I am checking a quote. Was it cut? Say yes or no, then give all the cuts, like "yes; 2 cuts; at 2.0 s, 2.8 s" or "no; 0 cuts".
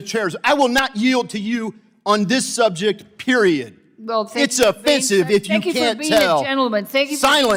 no; 0 cuts